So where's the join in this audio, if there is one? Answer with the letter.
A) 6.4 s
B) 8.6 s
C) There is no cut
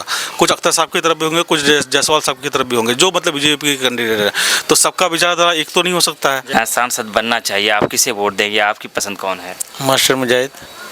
A